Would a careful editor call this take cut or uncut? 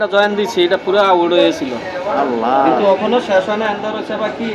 uncut